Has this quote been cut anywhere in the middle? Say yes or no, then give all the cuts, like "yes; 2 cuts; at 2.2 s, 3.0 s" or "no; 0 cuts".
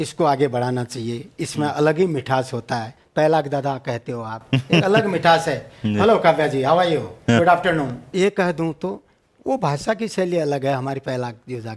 yes; 2 cuts; at 3.0 s, 8.0 s